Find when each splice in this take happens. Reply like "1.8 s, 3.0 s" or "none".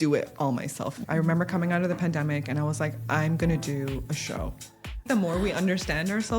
1.0 s, 5.1 s